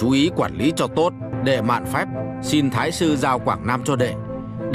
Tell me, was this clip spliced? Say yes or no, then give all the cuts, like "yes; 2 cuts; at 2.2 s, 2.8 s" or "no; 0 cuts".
yes; 1 cut; at 1.3 s